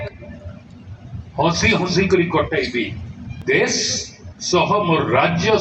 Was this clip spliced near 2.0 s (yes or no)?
no